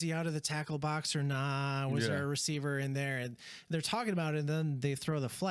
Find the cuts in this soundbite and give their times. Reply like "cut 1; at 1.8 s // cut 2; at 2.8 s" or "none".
none